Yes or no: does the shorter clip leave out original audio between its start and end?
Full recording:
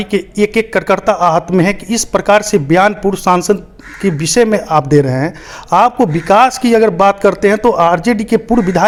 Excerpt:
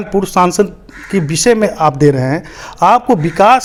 no